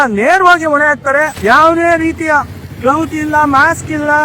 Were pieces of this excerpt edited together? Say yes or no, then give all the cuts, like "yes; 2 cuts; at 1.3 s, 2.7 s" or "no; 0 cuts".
yes; 1 cut; at 1.3 s